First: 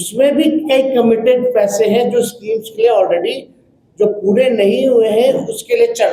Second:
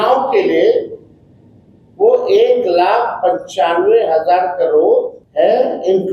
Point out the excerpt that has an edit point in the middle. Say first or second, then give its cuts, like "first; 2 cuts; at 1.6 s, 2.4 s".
second; 1 cut; at 5.2 s